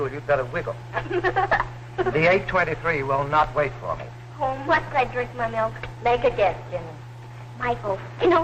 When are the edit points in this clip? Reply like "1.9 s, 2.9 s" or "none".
4.9 s